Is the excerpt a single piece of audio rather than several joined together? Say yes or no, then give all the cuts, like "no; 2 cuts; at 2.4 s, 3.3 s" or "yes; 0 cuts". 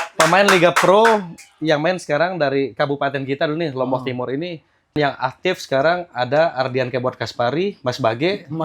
no; 1 cut; at 5.0 s